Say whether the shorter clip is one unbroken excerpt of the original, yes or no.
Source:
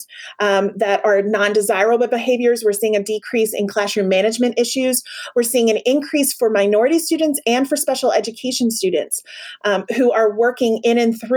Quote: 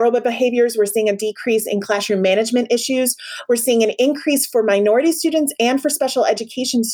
yes